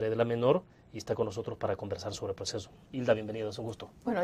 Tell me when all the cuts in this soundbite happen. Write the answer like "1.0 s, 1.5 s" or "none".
3.2 s